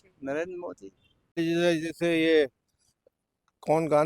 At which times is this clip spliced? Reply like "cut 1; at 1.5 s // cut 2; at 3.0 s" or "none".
cut 1; at 1.4 s